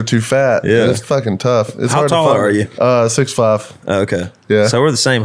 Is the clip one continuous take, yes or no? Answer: no